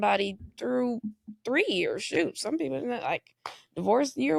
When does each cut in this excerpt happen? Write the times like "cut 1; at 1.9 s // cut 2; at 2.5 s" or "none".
none